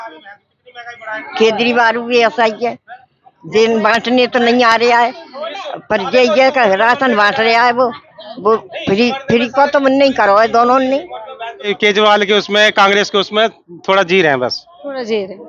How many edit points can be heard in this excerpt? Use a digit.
1